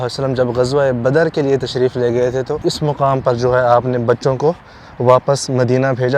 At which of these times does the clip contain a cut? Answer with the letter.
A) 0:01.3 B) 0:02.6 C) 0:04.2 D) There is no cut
B